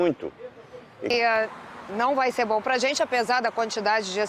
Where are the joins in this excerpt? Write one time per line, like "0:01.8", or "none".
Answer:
0:01.1

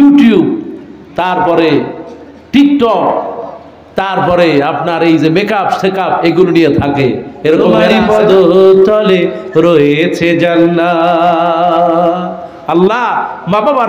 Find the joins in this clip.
0:07.9

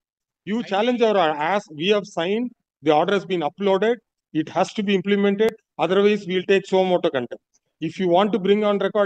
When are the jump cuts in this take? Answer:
none

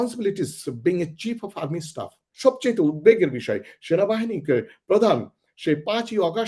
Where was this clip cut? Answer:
0:02.2

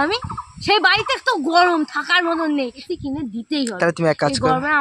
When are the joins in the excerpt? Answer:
0:02.8

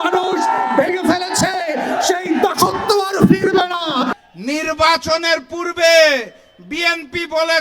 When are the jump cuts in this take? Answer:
0:04.1

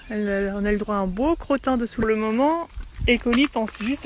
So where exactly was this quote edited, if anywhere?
0:02.0

